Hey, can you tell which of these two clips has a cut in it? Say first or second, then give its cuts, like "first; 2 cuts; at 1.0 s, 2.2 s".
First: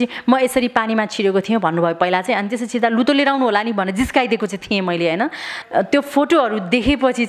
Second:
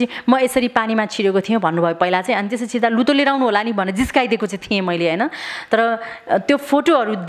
first; 1 cut; at 5.5 s